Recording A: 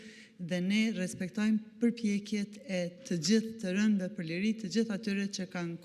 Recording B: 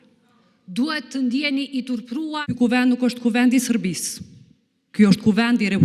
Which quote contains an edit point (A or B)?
B